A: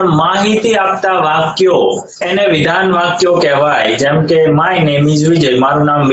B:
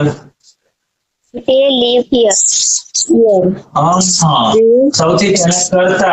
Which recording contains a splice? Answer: A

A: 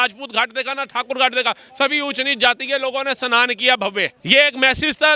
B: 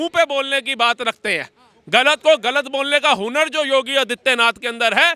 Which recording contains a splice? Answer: A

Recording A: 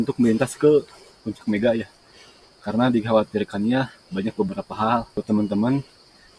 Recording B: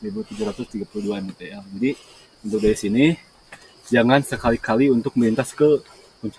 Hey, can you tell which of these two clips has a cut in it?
A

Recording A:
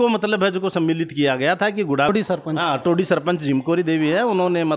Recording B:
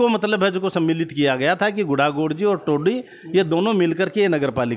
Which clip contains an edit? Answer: A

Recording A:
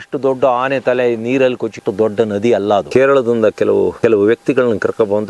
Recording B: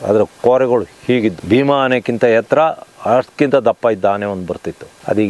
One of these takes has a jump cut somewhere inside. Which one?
A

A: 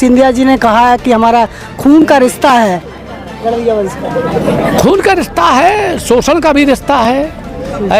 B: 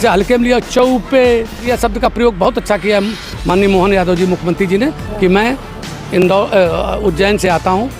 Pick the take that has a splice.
B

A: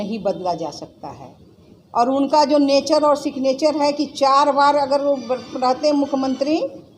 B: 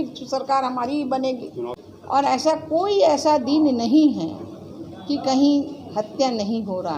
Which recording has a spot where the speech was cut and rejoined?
B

